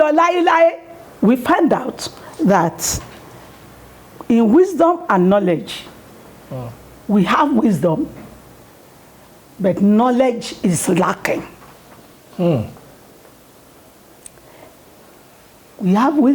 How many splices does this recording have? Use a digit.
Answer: 1